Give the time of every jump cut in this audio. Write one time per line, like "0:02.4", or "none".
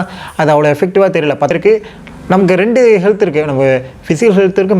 0:01.5